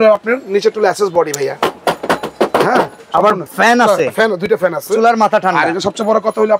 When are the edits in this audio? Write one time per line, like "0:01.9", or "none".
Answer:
none